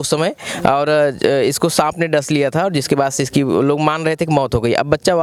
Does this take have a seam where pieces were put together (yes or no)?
no